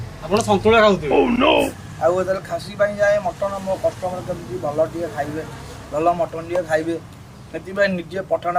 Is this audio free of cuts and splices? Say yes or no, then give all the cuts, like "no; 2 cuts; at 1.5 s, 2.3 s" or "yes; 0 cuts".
no; 1 cut; at 1.8 s